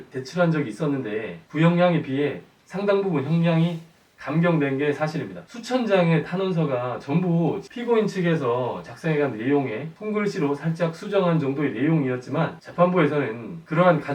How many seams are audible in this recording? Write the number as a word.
one